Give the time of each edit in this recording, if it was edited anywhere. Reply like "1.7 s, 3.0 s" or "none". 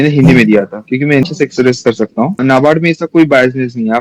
1.2 s, 2.4 s